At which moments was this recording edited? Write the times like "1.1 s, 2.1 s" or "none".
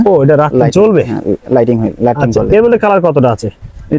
none

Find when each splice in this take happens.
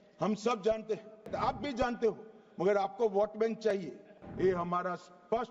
1.3 s, 4.2 s

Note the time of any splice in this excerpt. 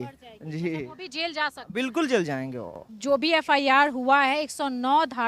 2.9 s

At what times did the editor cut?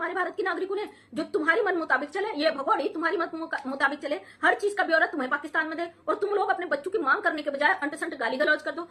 none

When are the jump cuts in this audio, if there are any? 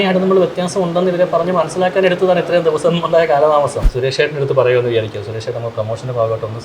3.8 s

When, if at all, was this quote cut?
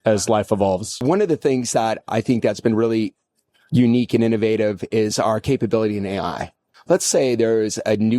1.0 s, 6.7 s

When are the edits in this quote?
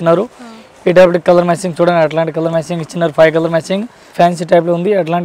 4.1 s

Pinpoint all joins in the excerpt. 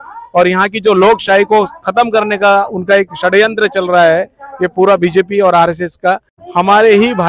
6.3 s

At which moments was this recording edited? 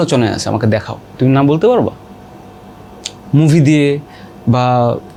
none

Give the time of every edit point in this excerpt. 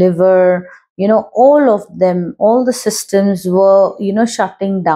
none

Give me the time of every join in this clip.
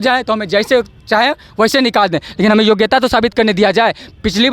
none

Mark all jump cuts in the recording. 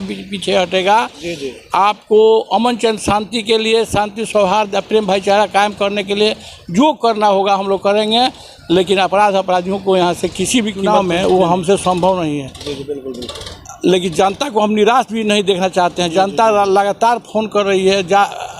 10.8 s

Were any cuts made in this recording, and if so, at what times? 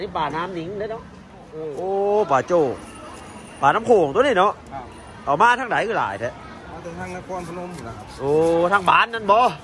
1.5 s

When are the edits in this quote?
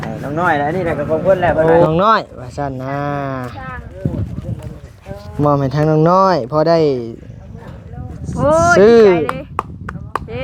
1.8 s

